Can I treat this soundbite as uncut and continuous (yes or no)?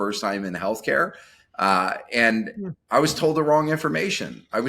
yes